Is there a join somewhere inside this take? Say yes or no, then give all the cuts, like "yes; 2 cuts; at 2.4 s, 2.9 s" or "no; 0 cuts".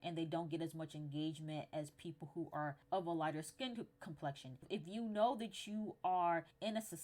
yes; 1 cut; at 4.6 s